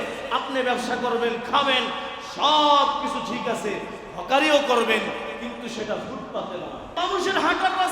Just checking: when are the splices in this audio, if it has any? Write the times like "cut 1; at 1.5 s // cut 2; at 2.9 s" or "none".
cut 1; at 7.0 s